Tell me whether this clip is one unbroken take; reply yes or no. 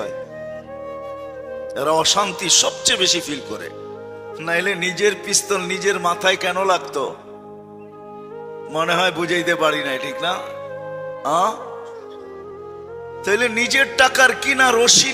no